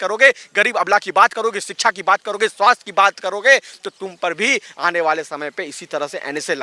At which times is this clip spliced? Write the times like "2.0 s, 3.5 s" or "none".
none